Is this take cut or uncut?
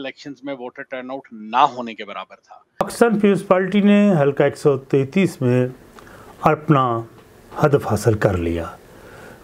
cut